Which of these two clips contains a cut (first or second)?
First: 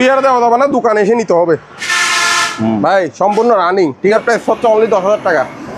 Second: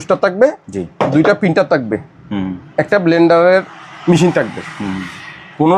first